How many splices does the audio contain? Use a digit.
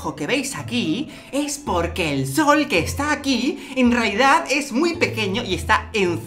0